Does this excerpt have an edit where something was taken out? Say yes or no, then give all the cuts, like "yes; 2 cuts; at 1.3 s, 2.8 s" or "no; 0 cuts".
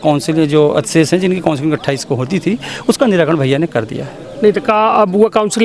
no; 0 cuts